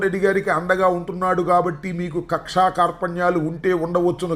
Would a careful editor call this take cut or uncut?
uncut